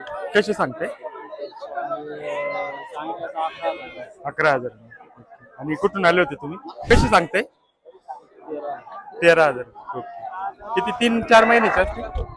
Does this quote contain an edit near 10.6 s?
no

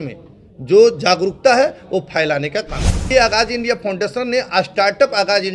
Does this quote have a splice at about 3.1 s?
yes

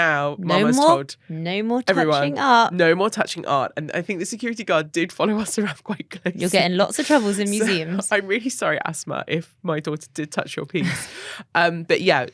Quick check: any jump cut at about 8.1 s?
no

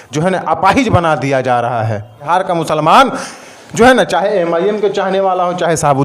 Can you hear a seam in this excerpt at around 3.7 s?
no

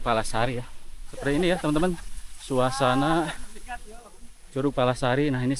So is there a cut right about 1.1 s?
yes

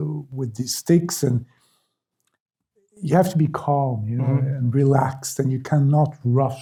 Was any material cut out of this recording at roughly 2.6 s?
no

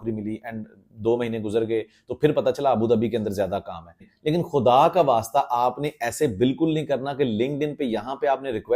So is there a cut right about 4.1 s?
yes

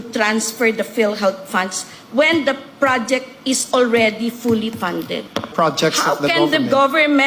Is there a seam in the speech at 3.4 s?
no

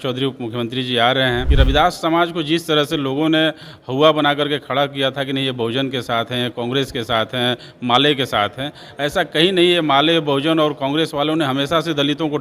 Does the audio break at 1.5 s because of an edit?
yes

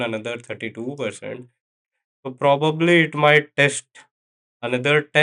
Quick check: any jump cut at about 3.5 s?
no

